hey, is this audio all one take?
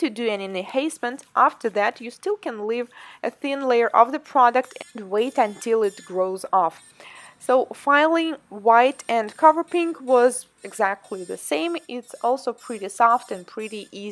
yes; 0 cuts

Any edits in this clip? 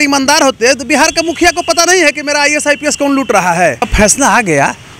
yes; 1 cut; at 3.9 s

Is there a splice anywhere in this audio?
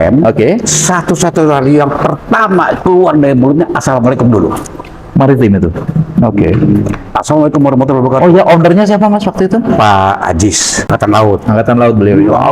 yes; 1 cut; at 10.9 s

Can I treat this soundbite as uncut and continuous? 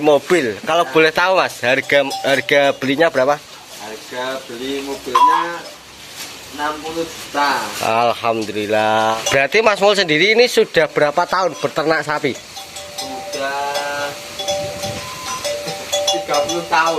no; 1 cut; at 9.2 s

